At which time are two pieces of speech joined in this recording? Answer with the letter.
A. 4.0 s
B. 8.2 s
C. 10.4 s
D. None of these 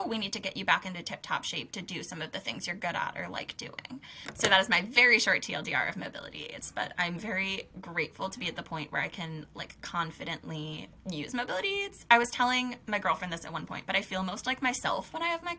A